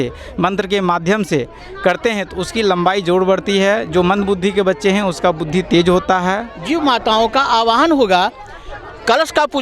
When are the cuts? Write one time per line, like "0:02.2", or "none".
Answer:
0:06.5